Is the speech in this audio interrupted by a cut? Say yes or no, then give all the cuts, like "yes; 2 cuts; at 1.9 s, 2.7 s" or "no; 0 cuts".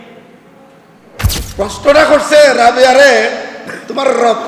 yes; 1 cut; at 1.4 s